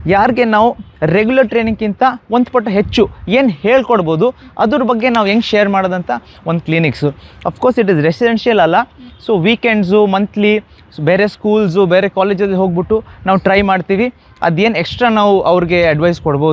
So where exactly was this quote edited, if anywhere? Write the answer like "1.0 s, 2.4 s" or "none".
none